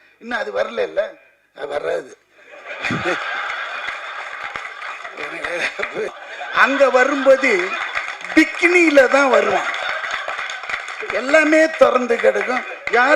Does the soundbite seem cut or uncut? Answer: cut